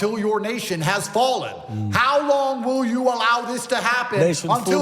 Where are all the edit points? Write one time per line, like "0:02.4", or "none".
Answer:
0:02.4